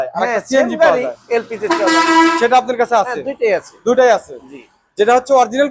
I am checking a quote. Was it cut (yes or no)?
no